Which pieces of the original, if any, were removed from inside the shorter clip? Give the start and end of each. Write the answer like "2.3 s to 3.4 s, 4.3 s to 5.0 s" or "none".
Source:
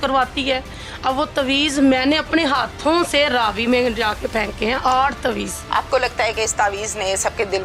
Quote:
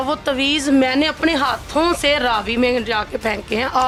none